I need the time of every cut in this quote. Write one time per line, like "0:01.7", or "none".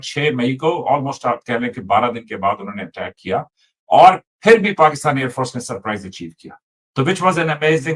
none